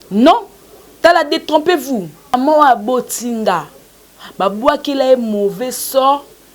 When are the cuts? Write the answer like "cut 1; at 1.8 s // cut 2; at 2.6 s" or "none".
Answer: cut 1; at 2.3 s